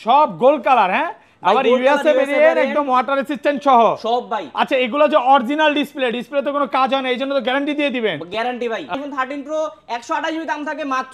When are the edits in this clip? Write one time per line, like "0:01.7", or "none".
0:08.9